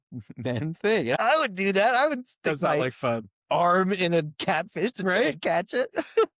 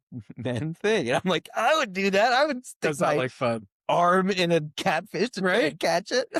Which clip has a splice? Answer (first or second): first